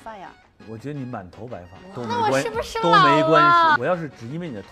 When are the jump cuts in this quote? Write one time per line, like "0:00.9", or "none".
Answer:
0:01.7
0:03.8